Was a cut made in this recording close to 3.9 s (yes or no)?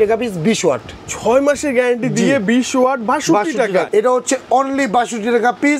yes